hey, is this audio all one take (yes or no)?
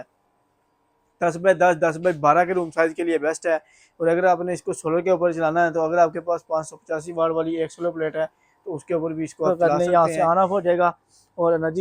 no